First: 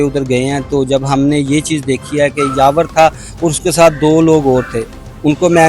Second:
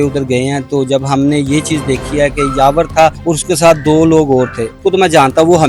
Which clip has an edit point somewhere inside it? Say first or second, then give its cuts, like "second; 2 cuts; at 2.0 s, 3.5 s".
second; 2 cuts; at 3.2 s, 4.8 s